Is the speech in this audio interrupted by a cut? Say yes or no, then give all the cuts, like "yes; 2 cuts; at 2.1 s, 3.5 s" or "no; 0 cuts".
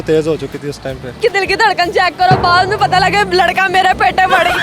yes; 1 cut; at 1.2 s